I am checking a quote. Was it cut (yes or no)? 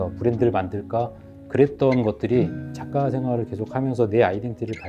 no